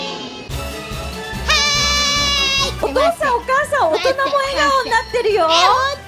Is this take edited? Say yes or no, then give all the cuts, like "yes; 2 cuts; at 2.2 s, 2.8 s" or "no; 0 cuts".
yes; 1 cut; at 2.8 s